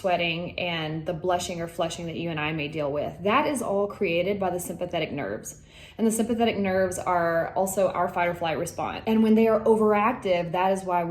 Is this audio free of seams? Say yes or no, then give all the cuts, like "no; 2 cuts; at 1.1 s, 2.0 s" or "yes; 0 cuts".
yes; 0 cuts